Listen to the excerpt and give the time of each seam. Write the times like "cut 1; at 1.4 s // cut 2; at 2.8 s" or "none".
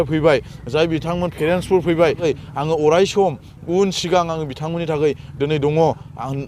cut 1; at 2.2 s